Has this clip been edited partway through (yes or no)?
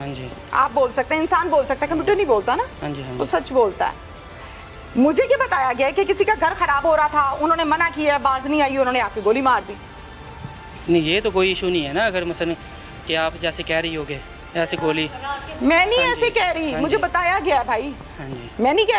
no